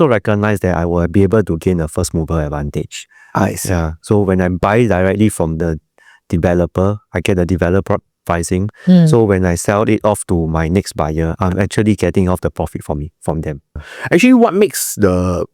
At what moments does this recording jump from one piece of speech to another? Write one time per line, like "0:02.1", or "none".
none